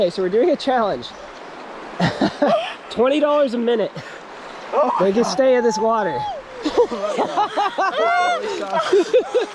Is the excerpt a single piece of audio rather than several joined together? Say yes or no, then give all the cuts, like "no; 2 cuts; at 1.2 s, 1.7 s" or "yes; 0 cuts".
yes; 0 cuts